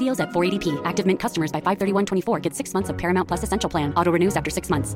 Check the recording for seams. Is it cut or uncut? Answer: uncut